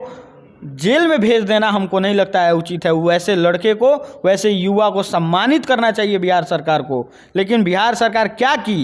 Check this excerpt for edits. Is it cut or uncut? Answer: uncut